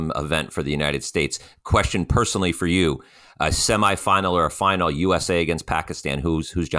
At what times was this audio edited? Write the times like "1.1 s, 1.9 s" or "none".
none